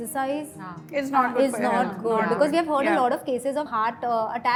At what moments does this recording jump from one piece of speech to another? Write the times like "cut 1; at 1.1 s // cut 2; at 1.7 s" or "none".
none